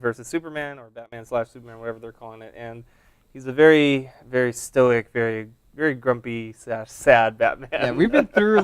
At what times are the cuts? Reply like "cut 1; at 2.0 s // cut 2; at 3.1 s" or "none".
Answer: cut 1; at 4.9 s